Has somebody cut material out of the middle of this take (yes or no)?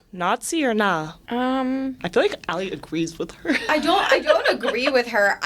yes